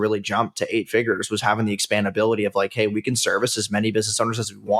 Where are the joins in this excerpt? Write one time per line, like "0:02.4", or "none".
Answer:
none